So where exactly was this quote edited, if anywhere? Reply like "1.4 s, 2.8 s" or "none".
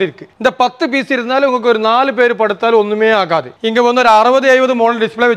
3.5 s